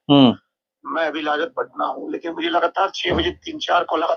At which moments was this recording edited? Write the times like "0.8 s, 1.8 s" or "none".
none